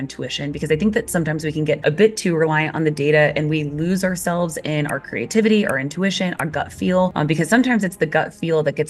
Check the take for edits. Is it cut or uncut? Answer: cut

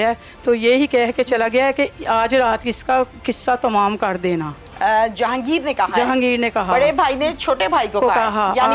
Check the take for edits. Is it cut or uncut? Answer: uncut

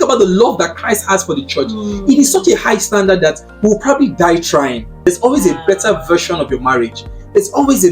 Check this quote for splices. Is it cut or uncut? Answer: cut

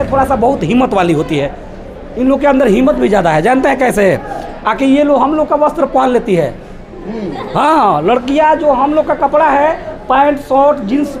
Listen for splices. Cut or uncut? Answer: uncut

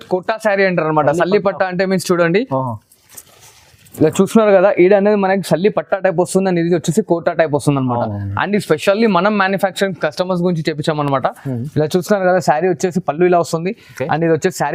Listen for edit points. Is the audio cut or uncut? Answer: uncut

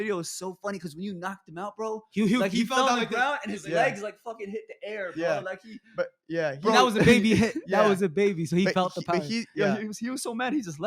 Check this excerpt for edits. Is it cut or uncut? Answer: cut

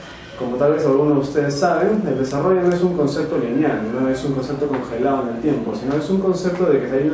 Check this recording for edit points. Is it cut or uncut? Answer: uncut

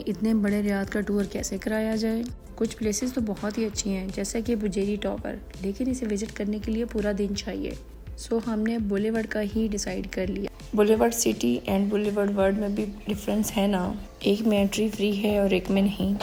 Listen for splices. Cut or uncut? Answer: uncut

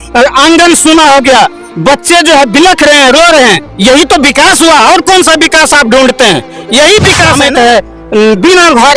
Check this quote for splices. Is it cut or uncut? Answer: cut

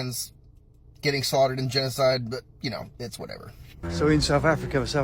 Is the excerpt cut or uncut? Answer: cut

